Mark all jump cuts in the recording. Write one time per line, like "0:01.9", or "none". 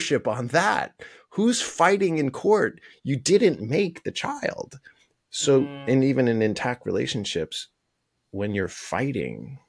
none